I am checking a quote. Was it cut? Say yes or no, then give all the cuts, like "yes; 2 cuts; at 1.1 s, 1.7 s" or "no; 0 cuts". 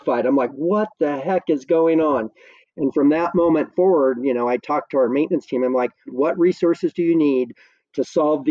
yes; 1 cut; at 6.1 s